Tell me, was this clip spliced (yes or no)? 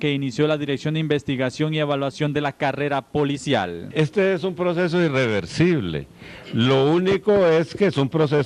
yes